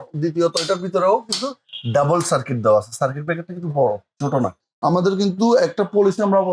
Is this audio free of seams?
no; 1 cut; at 4.7 s

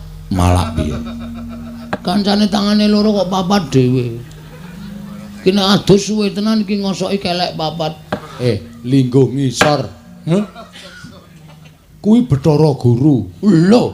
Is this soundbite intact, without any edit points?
no; 2 cuts; at 2.0 s, 8.4 s

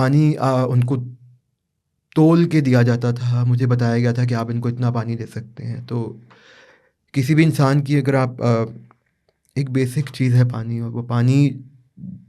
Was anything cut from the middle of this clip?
no; 0 cuts

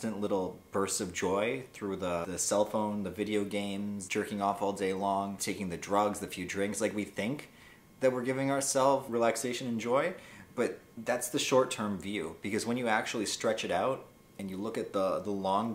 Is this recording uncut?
no; 5 cuts; at 2.2 s, 4.0 s, 5.4 s, 9.1 s, 10.9 s

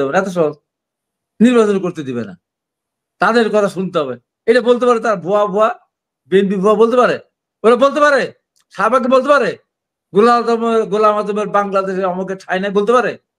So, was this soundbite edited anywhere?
no; 0 cuts

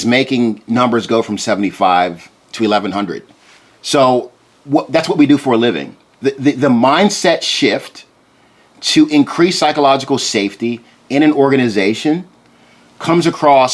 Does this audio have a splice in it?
no; 0 cuts

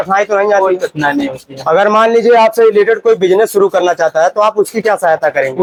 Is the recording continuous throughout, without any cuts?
yes; 0 cuts

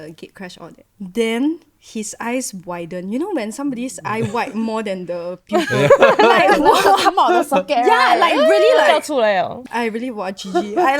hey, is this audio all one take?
yes; 0 cuts

